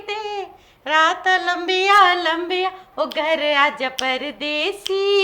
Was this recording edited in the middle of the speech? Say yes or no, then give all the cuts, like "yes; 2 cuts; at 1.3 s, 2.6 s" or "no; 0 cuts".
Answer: yes; 1 cut; at 2.9 s